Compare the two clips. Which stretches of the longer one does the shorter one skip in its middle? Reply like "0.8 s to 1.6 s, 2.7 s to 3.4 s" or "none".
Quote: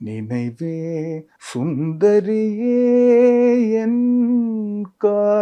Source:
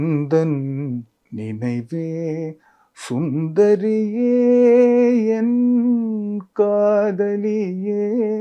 2.7 s to 2.9 s